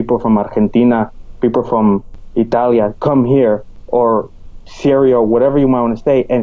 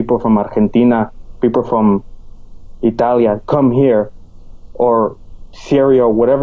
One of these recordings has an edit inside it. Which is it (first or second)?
first